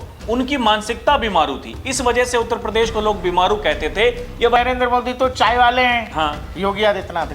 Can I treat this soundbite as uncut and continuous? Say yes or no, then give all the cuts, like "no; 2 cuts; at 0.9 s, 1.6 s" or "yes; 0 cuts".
no; 1 cut; at 4.6 s